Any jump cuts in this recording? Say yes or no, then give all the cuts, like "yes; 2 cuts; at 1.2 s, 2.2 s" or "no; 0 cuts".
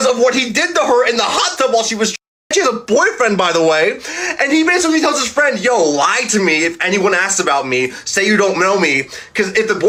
no; 0 cuts